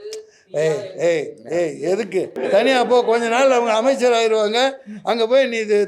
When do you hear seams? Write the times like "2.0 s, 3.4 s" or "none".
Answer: 2.3 s